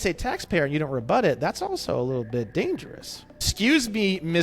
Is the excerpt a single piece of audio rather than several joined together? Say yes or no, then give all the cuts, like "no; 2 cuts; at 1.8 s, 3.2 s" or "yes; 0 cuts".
no; 1 cut; at 3.5 s